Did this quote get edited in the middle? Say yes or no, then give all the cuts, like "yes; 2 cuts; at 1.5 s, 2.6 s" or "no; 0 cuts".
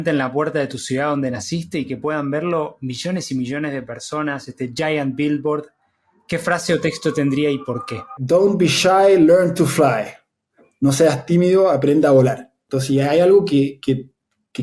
yes; 2 cuts; at 8.1 s, 12.5 s